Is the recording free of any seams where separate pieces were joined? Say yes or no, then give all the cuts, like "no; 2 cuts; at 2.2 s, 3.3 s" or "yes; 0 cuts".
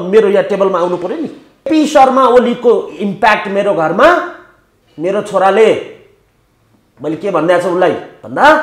no; 1 cut; at 1.7 s